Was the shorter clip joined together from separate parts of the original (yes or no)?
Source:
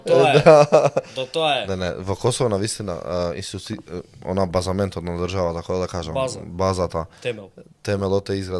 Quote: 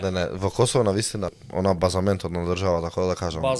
yes